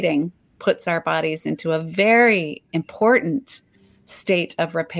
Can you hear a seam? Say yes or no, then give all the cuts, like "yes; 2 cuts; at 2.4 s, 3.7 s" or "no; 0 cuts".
no; 0 cuts